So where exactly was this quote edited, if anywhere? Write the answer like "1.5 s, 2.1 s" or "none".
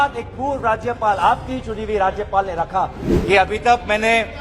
3.1 s